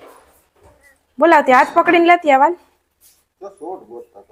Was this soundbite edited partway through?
no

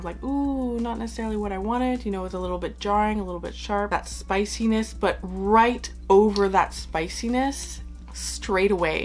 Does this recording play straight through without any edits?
yes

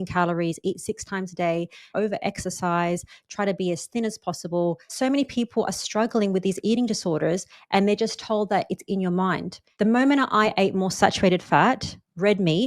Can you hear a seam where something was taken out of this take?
yes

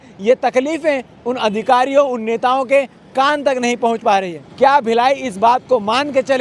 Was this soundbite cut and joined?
yes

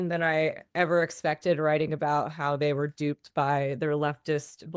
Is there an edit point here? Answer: no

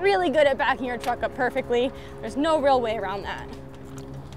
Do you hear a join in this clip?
no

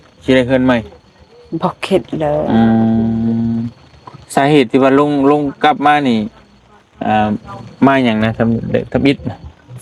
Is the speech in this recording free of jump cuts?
yes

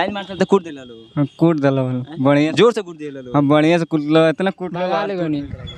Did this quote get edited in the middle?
yes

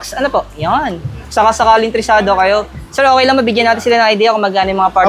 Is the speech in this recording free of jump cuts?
yes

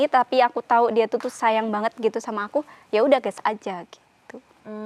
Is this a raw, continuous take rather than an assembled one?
yes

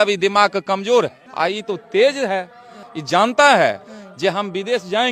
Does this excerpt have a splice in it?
no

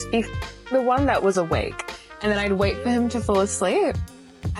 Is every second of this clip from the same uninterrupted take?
yes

